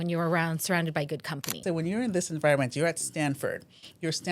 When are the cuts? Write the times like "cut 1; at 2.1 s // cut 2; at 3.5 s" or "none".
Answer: cut 1; at 1.6 s